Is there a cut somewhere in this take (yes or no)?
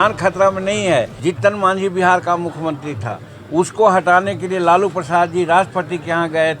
yes